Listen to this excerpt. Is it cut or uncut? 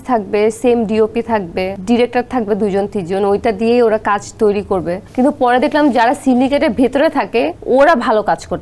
cut